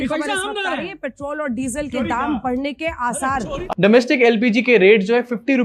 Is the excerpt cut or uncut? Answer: cut